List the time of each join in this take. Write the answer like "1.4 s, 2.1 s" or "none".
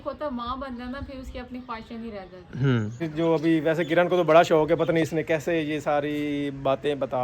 3.1 s